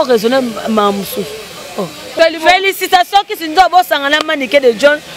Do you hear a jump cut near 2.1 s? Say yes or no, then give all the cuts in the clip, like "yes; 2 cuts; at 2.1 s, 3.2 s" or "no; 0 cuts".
yes; 1 cut; at 2.1 s